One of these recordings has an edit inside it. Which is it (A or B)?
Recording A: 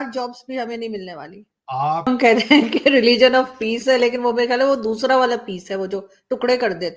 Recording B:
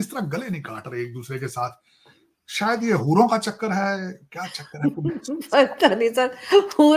A